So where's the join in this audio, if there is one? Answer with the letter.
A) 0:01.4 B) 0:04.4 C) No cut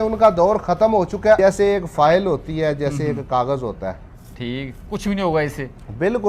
A